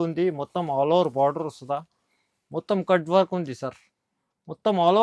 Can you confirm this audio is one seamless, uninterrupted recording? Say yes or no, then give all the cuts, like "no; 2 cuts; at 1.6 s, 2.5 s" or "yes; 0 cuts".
yes; 0 cuts